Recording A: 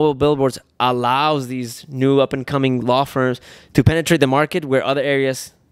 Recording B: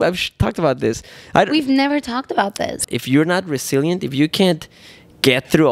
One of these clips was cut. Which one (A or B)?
B